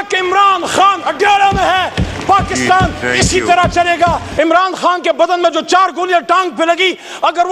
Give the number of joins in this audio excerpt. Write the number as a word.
one